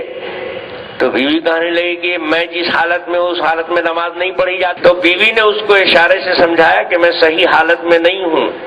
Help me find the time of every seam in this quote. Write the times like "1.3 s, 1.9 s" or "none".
4.8 s